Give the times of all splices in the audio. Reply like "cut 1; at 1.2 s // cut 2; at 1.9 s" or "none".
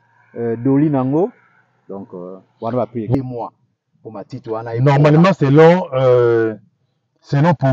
cut 1; at 3.1 s